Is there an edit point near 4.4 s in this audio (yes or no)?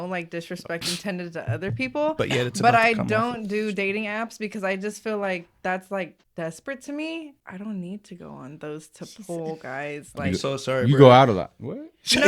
no